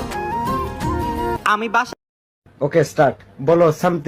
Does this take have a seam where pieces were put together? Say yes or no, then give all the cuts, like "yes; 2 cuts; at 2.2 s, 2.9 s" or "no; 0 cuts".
yes; 1 cut; at 2.0 s